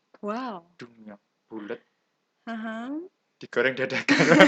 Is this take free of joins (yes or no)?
yes